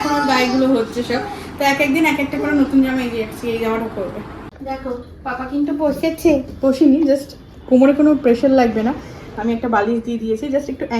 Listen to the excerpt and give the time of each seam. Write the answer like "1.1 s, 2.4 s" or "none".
4.4 s